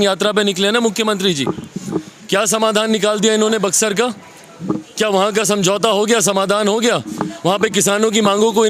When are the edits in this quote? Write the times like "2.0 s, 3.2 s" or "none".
none